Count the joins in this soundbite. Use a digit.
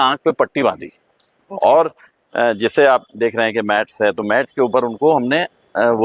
0